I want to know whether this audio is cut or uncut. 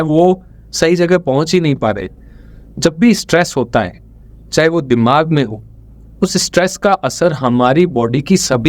cut